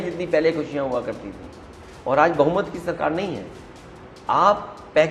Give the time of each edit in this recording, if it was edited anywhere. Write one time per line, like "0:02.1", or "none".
none